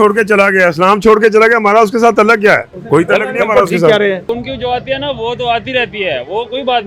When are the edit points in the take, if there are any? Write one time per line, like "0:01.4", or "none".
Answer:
0:02.7
0:04.4